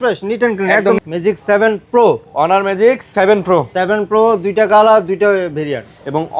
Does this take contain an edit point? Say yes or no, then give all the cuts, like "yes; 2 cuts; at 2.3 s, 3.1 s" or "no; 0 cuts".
yes; 1 cut; at 1.0 s